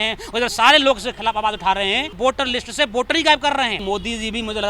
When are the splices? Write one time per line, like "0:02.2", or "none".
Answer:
0:02.1
0:03.8